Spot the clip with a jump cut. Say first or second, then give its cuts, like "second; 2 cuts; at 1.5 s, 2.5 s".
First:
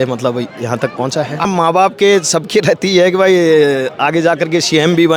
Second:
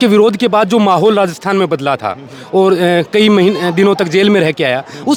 first; 1 cut; at 1.5 s